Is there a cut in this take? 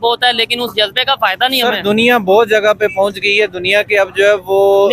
no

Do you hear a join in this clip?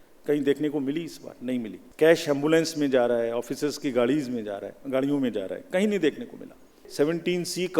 yes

